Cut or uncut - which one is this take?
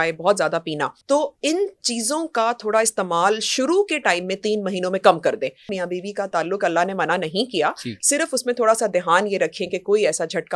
cut